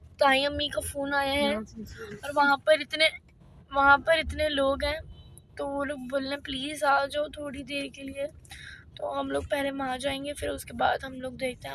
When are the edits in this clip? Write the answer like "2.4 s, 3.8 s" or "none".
none